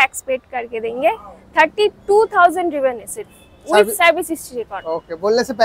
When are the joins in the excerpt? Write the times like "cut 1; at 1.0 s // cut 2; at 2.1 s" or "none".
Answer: none